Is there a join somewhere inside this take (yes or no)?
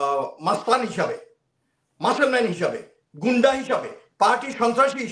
no